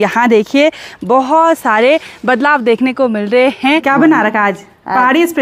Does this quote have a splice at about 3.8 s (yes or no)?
yes